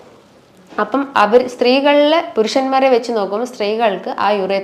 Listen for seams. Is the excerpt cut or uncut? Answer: uncut